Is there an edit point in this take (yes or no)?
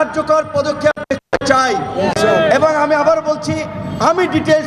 no